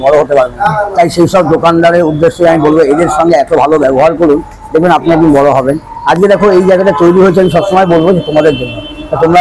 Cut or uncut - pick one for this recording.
uncut